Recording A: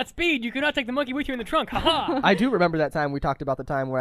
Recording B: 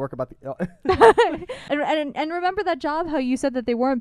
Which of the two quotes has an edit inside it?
B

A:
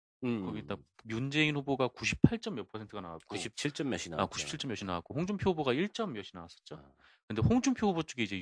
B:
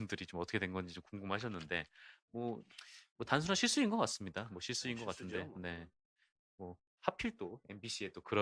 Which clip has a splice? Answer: B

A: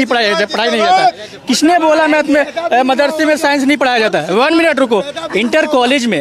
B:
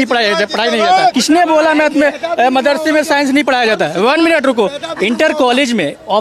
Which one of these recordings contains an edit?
B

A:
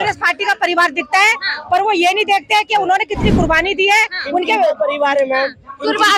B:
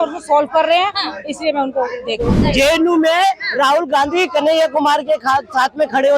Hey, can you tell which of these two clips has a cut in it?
B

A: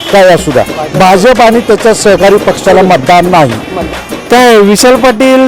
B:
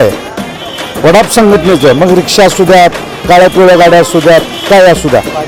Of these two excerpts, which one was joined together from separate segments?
A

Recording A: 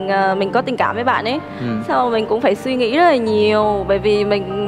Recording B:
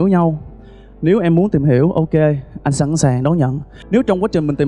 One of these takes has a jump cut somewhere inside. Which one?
B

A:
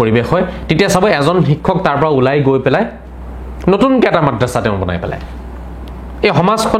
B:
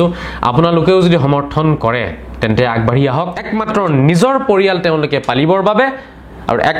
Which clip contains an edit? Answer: B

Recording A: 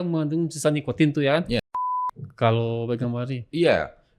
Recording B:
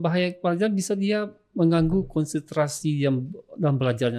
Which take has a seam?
A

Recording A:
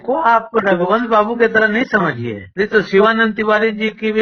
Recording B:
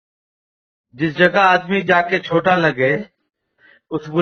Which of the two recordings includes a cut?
A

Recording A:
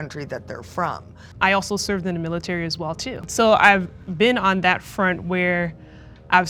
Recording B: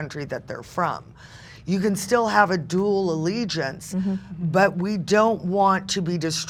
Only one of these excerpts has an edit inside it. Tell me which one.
A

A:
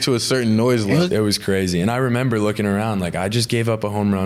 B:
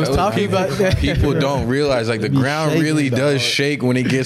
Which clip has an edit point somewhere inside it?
A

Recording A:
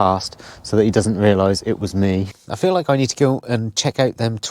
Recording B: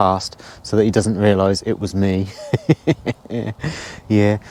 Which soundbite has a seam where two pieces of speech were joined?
A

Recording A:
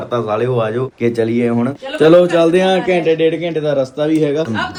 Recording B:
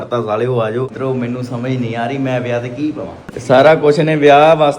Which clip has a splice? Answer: B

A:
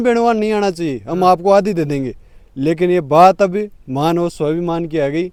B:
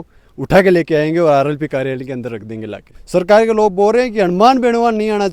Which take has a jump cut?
B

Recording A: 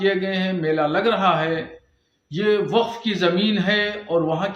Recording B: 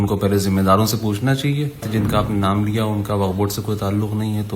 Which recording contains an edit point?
B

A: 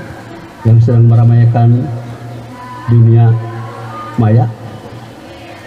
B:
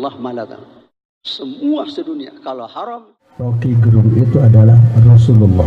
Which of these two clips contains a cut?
B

